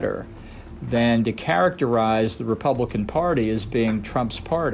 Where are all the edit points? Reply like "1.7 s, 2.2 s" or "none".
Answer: none